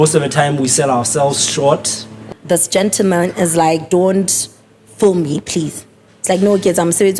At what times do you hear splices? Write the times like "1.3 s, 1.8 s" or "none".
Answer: 2.3 s